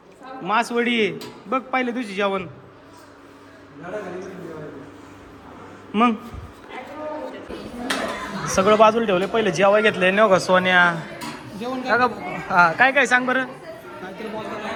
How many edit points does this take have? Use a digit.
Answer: 0